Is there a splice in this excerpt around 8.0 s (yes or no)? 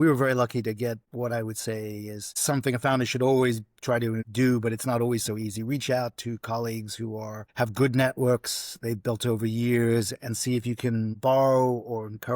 no